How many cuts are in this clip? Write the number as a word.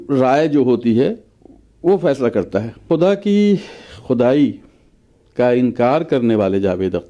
one